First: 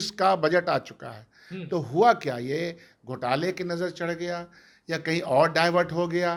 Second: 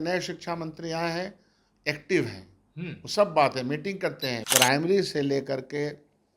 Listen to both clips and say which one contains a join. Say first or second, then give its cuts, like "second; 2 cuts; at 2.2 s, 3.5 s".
second; 1 cut; at 4.3 s